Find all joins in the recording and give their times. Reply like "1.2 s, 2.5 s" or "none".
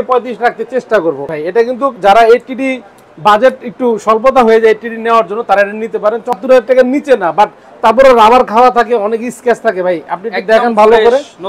1.2 s, 6.4 s